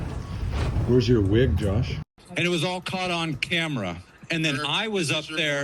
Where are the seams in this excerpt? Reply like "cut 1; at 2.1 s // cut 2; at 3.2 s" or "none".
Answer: cut 1; at 2.2 s